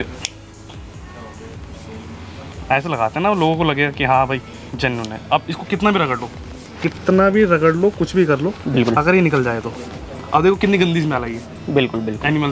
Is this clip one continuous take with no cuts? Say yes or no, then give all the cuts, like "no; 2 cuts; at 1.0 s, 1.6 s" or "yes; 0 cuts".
yes; 0 cuts